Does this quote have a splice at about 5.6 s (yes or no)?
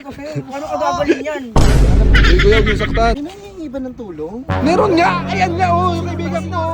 no